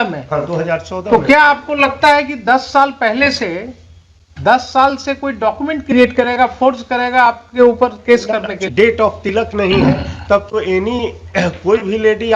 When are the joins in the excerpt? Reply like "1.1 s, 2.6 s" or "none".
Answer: 8.6 s